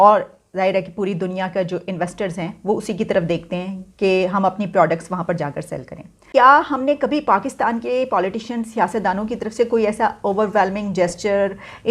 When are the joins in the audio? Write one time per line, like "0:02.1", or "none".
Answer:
0:06.2